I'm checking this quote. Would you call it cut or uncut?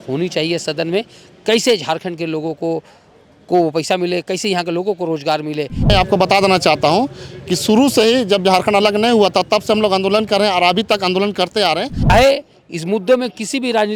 cut